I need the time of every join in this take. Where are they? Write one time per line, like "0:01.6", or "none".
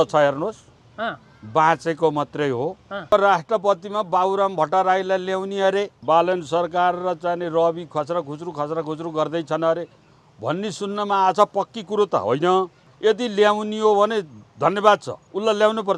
0:03.1

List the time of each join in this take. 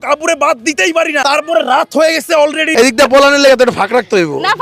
0:01.2
0:02.7

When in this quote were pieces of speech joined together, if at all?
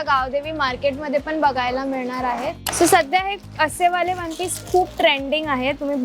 0:02.6

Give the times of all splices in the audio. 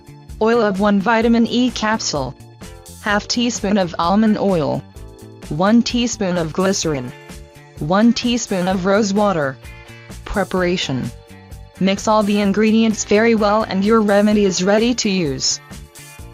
0:13.7

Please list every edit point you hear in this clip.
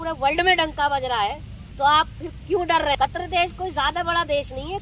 0:03.0

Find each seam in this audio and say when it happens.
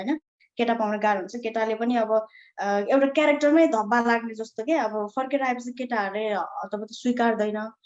none

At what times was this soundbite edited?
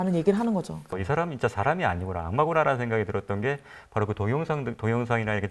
0:01.0

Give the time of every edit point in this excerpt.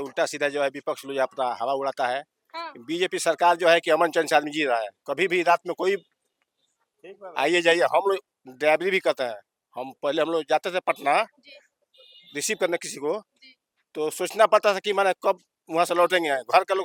none

